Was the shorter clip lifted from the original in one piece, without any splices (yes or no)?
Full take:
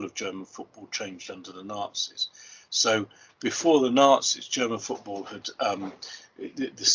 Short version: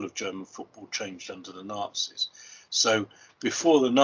yes